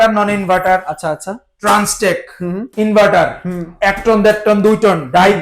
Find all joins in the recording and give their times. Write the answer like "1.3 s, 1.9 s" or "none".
2.6 s